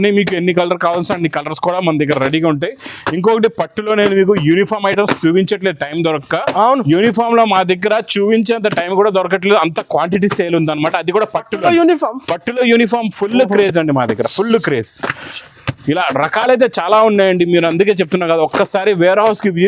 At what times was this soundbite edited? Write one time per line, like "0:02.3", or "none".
none